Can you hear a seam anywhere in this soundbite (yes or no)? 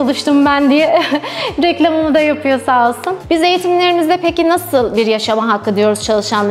yes